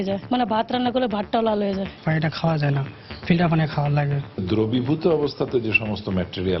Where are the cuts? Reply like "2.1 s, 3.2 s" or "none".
4.4 s

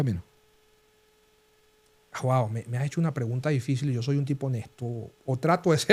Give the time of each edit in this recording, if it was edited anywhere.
none

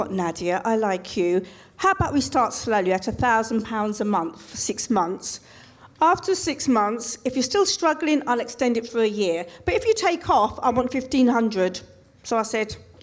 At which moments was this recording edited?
none

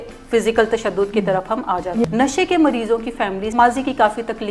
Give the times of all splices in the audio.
2.0 s, 3.5 s

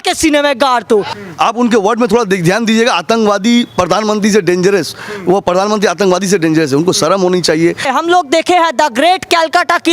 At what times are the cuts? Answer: 1.2 s, 7.9 s

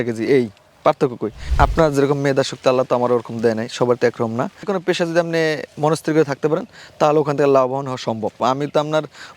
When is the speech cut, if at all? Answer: 1.4 s, 4.6 s

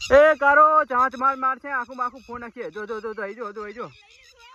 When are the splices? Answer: none

